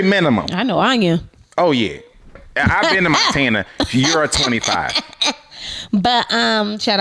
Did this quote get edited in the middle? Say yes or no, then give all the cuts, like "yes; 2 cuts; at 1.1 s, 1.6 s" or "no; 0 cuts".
no; 0 cuts